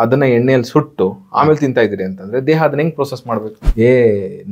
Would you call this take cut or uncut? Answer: cut